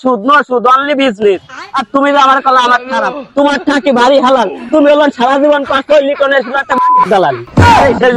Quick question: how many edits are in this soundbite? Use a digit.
0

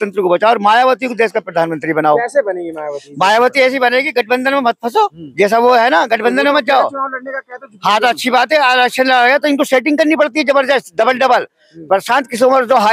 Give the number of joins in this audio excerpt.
0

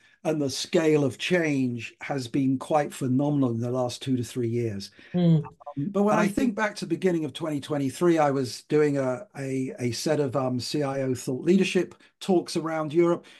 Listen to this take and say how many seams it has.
1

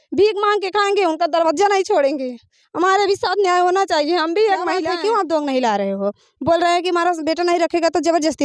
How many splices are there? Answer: 1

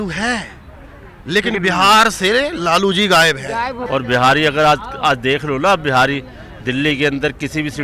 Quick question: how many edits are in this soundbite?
1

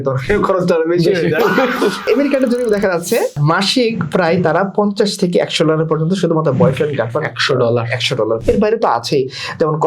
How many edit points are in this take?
3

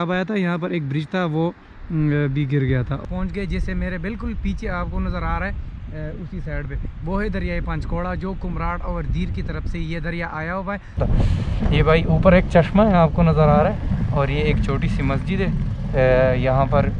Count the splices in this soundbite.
2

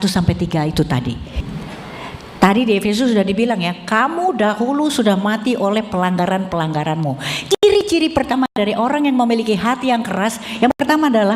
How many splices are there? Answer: 1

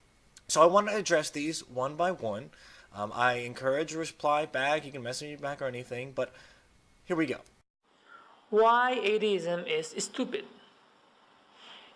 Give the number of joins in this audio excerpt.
1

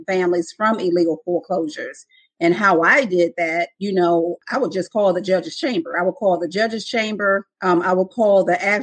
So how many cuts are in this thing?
2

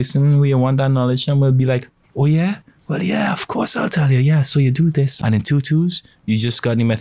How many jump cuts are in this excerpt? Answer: 1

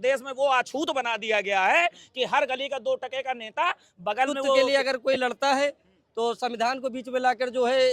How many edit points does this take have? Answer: 1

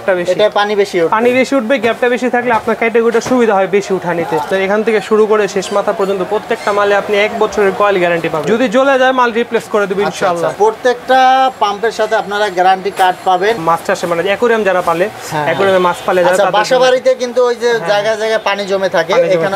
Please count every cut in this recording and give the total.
3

